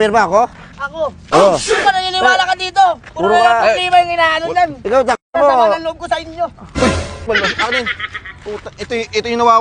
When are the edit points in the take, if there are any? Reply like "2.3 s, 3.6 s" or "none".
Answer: 7.3 s

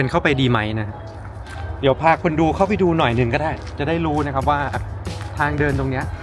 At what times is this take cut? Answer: none

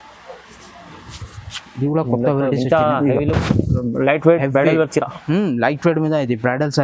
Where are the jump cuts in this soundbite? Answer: none

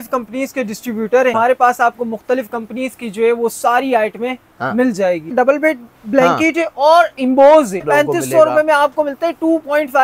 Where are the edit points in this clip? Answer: 1.3 s, 5.3 s, 7.9 s

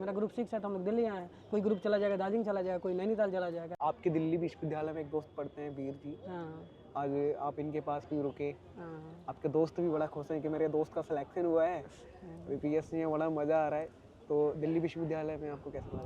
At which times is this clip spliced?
3.7 s

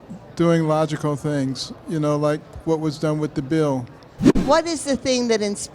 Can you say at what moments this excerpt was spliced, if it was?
4.3 s

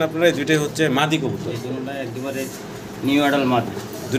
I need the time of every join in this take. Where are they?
none

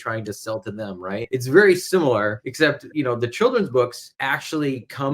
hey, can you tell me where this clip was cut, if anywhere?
1.3 s, 2.4 s, 4.1 s

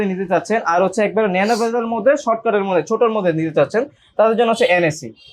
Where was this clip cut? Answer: none

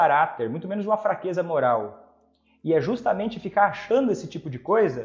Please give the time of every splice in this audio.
none

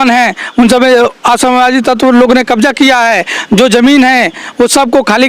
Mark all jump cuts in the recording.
none

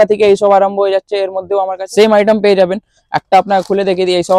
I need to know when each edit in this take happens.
1.8 s

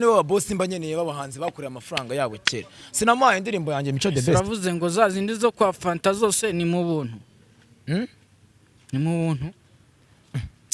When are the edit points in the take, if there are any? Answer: none

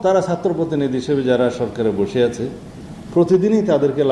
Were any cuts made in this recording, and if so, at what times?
none

